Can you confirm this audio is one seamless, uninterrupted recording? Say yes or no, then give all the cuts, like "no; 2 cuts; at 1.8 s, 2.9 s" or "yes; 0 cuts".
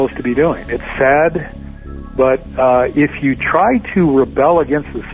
yes; 0 cuts